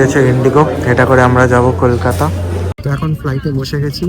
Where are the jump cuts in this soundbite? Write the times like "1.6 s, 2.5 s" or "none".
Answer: 2.7 s